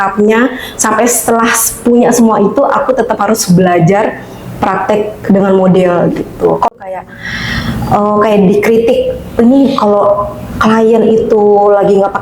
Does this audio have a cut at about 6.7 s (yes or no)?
yes